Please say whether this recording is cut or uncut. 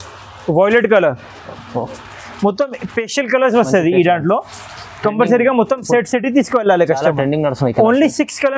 uncut